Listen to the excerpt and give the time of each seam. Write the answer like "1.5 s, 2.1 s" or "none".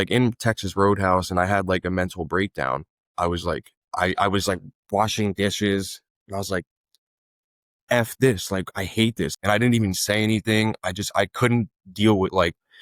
9.3 s